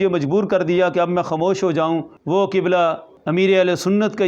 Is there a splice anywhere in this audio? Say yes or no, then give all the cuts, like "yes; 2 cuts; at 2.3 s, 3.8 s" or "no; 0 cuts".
yes; 2 cuts; at 2.1 s, 3.1 s